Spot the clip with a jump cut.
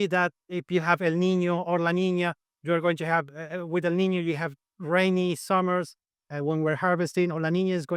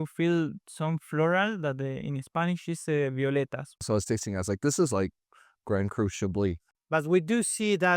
second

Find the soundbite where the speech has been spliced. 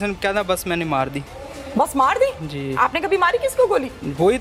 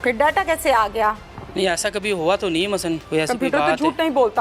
second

